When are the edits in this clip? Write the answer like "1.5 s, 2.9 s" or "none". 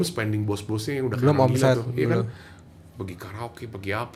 none

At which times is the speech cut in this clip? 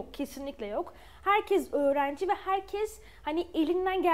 none

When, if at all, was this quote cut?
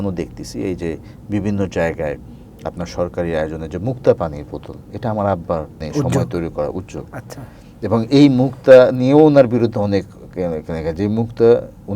5.8 s

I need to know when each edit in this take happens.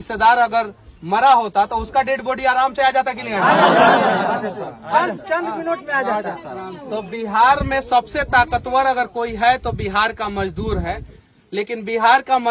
none

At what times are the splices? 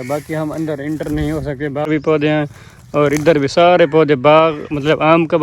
1.9 s

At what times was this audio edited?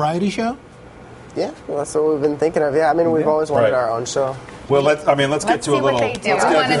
none

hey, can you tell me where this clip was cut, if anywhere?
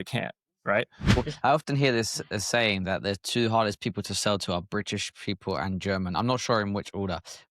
1.2 s

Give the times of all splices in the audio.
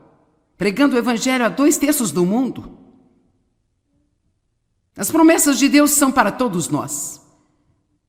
none

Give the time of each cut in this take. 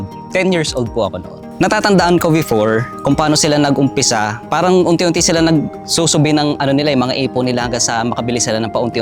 1.4 s

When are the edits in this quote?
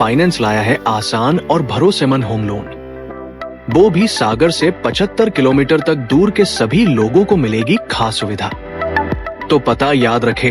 9.3 s

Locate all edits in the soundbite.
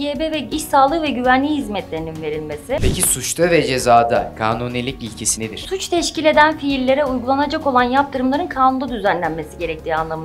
2.8 s

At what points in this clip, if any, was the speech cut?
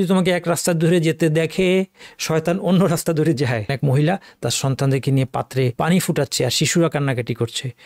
3.7 s, 5.7 s

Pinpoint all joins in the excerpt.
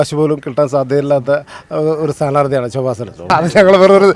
3.2 s

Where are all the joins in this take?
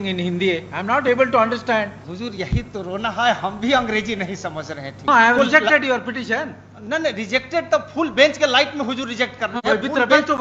2.0 s, 5.1 s

